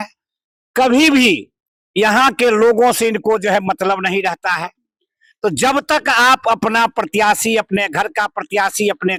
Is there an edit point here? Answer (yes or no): no